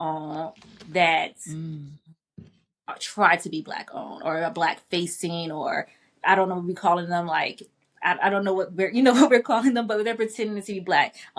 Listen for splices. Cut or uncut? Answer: uncut